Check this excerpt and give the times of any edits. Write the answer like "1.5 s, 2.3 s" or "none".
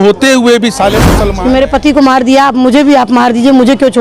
1.1 s